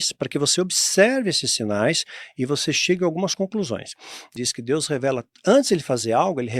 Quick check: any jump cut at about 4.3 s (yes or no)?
yes